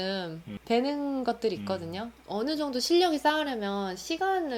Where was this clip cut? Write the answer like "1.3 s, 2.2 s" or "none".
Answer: 2.1 s